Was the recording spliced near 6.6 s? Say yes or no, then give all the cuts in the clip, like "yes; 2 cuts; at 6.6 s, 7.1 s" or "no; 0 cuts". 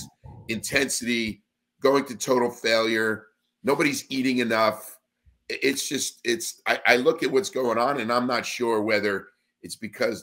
no; 0 cuts